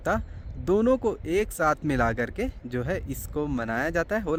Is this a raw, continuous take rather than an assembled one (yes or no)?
yes